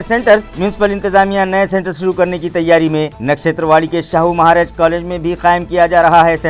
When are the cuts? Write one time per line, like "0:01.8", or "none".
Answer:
none